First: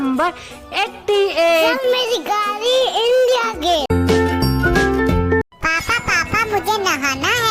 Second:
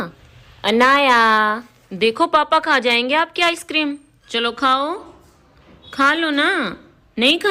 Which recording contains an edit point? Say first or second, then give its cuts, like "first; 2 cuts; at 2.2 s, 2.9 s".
first; 2 cuts; at 3.9 s, 5.4 s